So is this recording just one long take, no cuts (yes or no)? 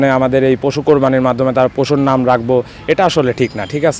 yes